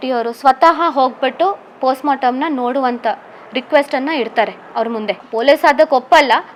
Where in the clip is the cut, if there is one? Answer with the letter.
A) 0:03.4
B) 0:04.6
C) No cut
C